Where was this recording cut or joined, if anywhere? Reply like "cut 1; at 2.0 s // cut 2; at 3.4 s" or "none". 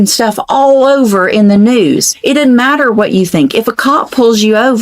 cut 1; at 2.1 s